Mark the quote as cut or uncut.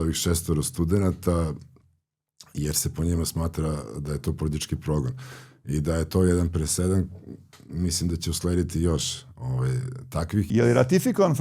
cut